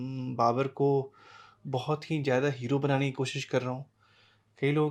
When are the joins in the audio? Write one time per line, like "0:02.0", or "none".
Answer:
none